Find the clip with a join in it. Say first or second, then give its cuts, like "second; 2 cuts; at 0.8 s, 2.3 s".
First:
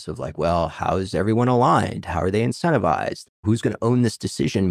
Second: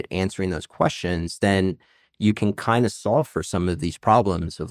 first; 2 cuts; at 1.1 s, 3.2 s